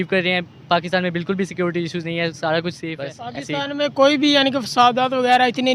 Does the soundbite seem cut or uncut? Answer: cut